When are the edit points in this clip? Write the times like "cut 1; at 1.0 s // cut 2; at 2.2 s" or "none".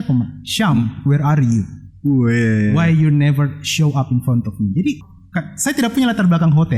cut 1; at 5.0 s